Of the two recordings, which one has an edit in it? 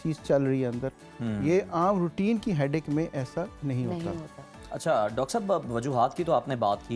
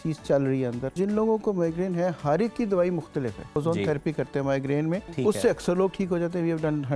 second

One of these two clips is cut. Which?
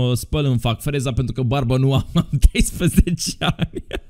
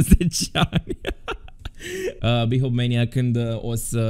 second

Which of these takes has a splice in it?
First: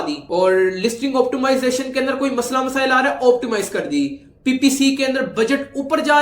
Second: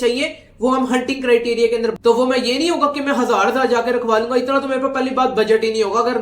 second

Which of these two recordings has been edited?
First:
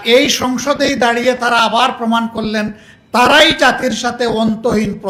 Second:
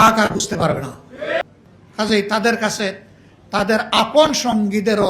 second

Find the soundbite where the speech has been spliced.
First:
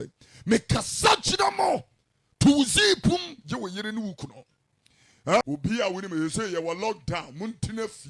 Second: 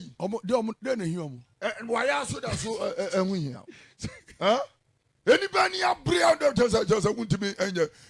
first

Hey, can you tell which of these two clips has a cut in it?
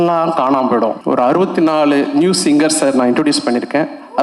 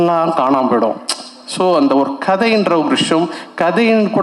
first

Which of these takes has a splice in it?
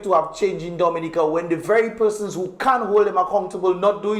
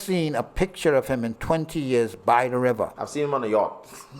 second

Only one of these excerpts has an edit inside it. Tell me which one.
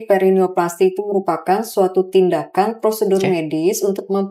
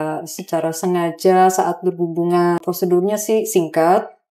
second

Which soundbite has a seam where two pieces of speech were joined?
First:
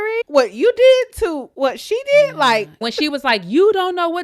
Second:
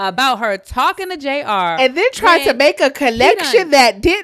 first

